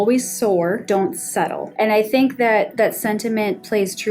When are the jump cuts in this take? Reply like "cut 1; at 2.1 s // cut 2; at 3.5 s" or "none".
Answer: cut 1; at 1.1 s